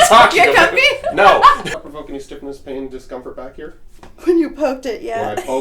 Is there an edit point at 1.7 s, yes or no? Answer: yes